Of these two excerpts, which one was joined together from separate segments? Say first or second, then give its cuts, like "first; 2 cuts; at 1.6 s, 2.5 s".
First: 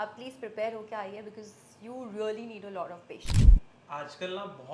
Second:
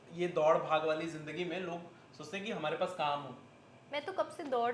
first; 1 cut; at 3.3 s